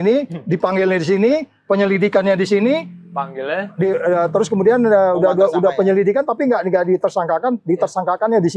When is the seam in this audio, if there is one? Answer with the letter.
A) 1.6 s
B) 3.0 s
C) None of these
C